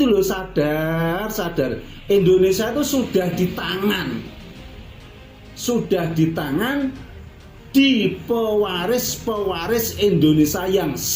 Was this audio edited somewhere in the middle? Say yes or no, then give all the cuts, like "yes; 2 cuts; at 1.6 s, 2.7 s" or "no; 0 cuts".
no; 0 cuts